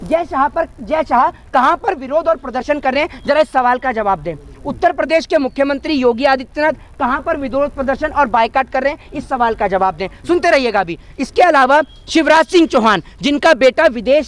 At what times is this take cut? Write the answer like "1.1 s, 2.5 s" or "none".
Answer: none